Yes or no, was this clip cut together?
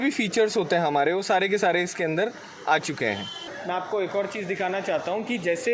yes